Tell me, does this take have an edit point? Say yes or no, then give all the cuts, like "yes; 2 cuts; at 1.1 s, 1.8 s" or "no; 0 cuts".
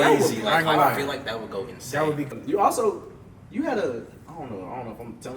yes; 1 cut; at 2.3 s